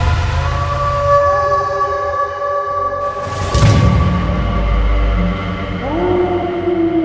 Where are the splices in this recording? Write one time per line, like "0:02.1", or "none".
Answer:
none